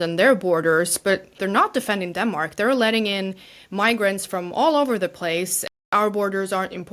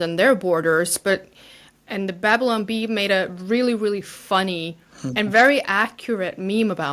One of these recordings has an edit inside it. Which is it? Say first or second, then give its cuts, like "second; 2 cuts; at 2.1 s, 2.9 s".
first; 2 cuts; at 1.3 s, 5.9 s